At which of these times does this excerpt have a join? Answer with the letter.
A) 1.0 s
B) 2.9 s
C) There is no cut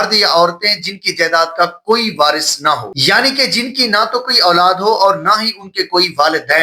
C